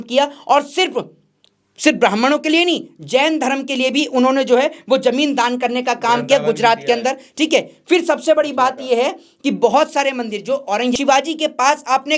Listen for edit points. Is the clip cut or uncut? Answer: cut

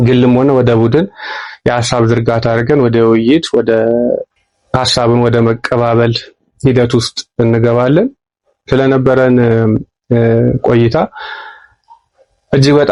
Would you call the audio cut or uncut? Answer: uncut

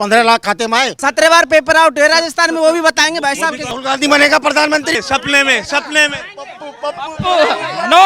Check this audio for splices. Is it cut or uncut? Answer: cut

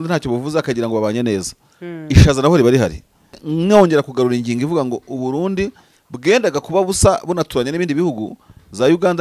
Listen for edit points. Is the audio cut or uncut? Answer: cut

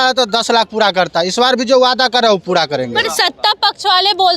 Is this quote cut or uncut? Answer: uncut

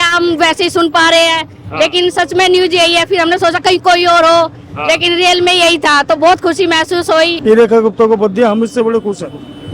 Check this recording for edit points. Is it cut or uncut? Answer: cut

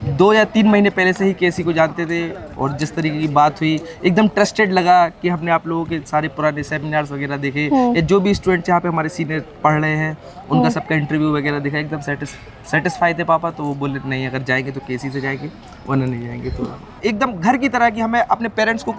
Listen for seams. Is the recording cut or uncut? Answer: cut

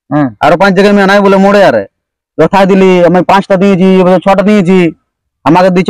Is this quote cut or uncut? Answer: uncut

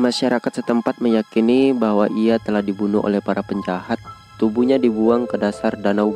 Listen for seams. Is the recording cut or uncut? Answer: uncut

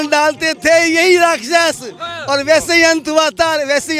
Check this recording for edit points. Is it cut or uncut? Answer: uncut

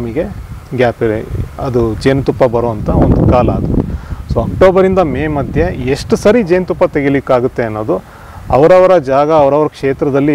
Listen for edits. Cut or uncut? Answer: uncut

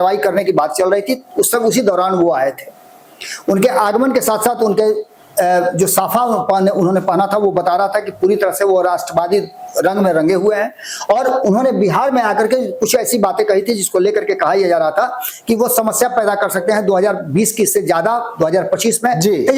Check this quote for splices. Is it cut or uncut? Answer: uncut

